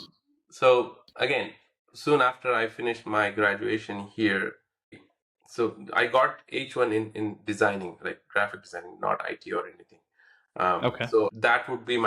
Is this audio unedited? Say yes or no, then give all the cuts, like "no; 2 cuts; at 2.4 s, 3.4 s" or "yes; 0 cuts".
no; 2 cuts; at 5.0 s, 11.3 s